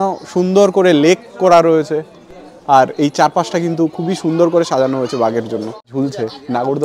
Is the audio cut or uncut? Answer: cut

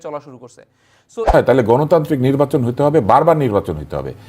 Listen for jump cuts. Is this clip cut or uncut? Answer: cut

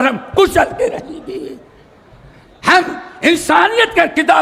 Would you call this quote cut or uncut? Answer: uncut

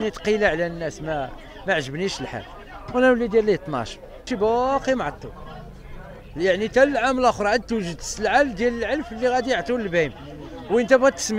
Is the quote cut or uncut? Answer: cut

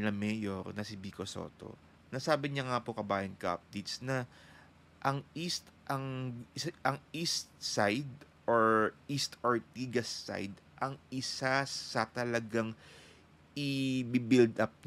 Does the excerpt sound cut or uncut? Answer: uncut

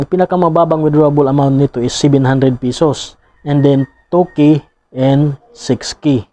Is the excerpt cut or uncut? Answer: uncut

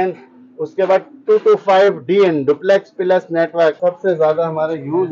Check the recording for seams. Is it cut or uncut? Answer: cut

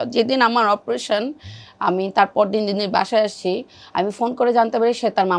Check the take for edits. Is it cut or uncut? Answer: uncut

